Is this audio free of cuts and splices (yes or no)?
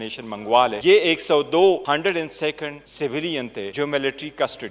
no